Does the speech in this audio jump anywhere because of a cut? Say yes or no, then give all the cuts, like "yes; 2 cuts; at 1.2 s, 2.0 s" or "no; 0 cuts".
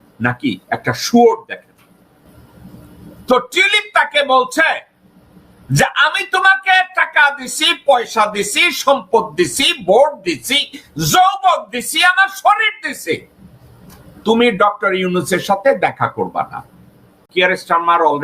yes; 2 cuts; at 2.3 s, 17.3 s